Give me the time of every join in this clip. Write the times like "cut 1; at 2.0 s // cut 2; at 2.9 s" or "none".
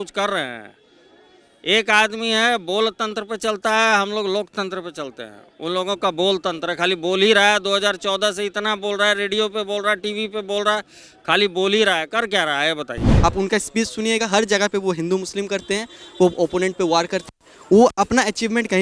cut 1; at 13.1 s